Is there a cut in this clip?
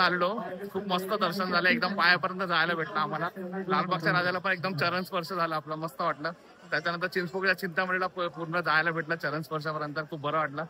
no; 0 cuts

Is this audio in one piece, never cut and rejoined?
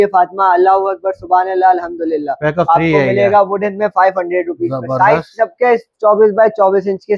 yes; 0 cuts

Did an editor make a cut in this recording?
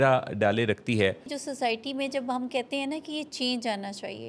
yes; 1 cut; at 1.3 s

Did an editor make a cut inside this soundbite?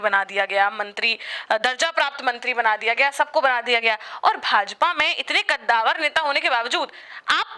no; 0 cuts

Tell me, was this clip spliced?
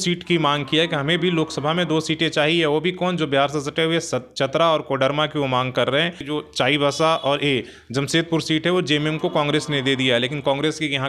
yes; 1 cut; at 6.2 s

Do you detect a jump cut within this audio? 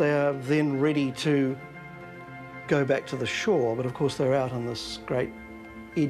no; 0 cuts

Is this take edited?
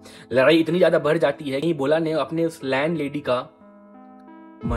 yes; 1 cut; at 1.6 s

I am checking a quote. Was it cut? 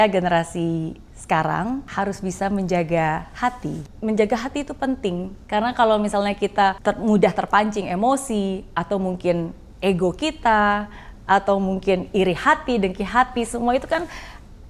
yes; 4 cuts; at 1.9 s, 3.9 s, 5.3 s, 6.8 s

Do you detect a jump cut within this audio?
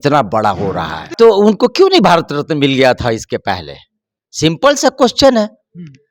yes; 1 cut; at 1.1 s

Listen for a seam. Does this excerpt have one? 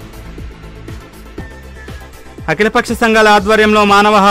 yes; 1 cut; at 2.1 s

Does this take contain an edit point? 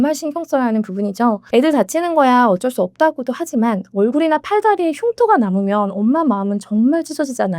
yes; 1 cut; at 1.4 s

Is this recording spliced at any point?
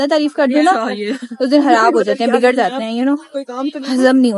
no; 0 cuts

